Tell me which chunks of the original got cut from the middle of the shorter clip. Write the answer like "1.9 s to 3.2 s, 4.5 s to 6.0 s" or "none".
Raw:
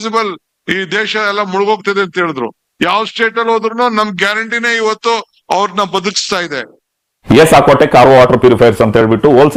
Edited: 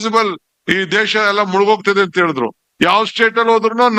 none